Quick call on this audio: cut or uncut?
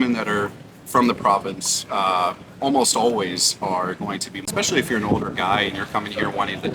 cut